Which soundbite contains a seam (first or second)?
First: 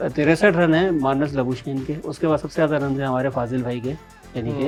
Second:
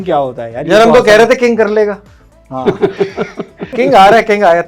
second